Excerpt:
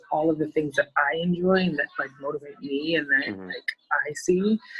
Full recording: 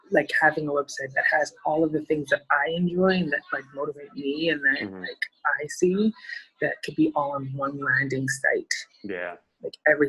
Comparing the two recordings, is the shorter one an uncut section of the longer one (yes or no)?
yes